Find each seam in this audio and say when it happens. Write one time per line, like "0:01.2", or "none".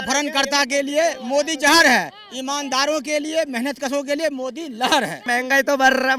0:05.2